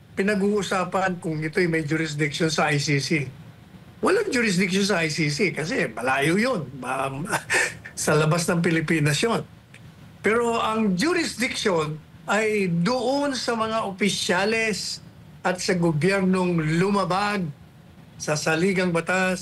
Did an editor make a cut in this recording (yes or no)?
no